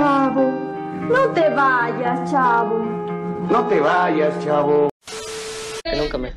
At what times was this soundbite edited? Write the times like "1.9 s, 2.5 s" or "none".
none